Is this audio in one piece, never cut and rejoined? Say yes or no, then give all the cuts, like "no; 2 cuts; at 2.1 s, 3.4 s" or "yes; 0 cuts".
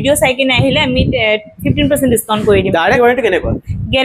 no; 1 cut; at 3.0 s